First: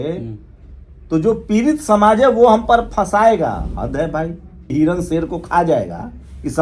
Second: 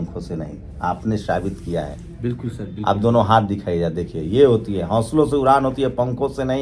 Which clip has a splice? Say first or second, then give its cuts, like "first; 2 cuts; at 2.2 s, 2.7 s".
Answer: first; 1 cut; at 4.7 s